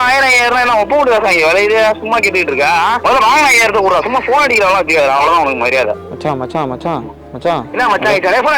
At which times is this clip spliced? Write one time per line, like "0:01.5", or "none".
0:02.0
0:03.0